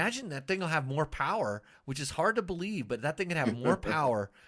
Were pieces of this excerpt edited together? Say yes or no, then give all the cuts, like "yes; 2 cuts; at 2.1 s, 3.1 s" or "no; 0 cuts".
no; 0 cuts